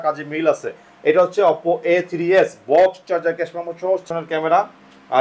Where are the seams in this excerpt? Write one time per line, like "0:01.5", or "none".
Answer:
0:04.1